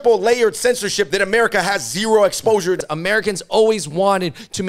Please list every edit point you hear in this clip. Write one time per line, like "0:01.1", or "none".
0:01.1
0:02.9